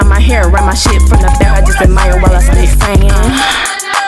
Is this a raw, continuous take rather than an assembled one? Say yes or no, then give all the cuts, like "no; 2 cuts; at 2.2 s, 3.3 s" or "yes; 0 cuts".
yes; 0 cuts